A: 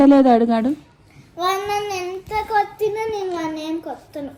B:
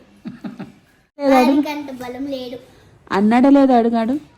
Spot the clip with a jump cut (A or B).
B